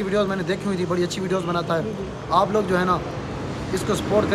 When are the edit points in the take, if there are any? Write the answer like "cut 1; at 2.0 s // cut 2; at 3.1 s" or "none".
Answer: none